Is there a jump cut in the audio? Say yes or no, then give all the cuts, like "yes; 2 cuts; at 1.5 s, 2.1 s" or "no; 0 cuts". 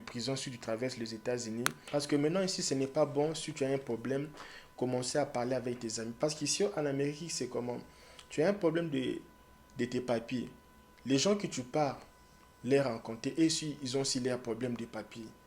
yes; 1 cut; at 1.8 s